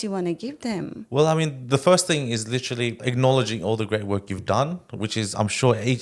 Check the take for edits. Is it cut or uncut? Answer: cut